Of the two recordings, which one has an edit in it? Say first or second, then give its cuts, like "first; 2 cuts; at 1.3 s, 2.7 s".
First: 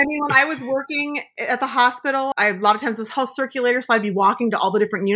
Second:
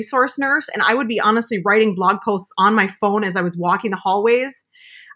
first; 2 cuts; at 1.3 s, 2.3 s